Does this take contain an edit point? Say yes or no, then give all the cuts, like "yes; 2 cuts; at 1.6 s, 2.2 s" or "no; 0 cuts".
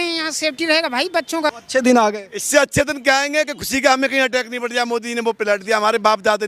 yes; 1 cut; at 1.5 s